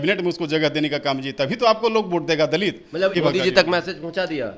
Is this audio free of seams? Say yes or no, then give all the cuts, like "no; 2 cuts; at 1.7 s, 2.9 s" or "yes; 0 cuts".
no; 1 cut; at 3.2 s